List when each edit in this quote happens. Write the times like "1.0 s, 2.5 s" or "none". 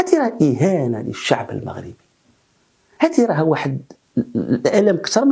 none